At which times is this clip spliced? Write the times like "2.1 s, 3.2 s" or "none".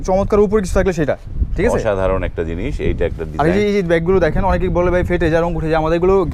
none

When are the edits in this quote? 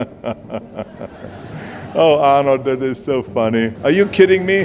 3.7 s

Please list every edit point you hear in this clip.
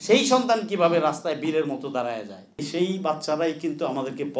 2.6 s

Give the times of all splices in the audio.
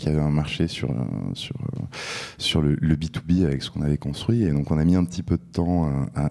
none

